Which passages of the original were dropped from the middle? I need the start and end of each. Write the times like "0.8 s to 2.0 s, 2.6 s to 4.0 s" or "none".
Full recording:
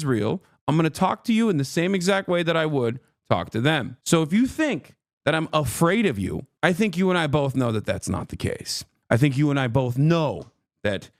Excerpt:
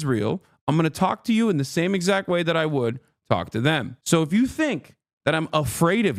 none